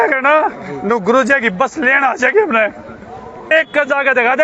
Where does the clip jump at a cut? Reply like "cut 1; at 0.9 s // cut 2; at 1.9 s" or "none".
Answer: cut 1; at 3.5 s